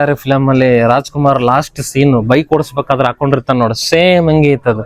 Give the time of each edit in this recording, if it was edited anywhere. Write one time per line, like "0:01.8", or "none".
none